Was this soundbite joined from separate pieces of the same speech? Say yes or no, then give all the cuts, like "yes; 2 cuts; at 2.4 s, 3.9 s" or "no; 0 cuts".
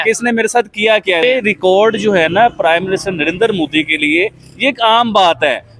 yes; 1 cut; at 1.2 s